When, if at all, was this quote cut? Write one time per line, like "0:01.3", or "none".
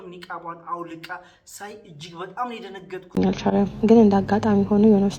0:03.2